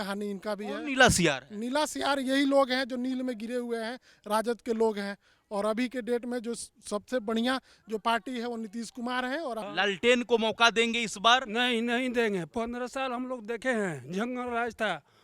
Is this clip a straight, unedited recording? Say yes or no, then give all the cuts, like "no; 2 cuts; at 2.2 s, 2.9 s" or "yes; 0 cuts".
no; 1 cut; at 9.6 s